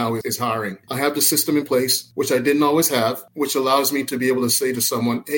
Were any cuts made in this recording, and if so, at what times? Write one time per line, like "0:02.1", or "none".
none